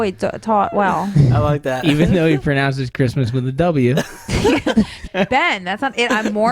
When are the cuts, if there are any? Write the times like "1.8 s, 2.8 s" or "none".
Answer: 5.0 s

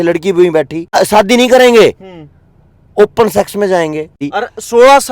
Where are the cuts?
0.9 s, 4.2 s

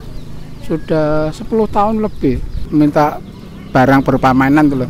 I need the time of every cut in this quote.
2.6 s

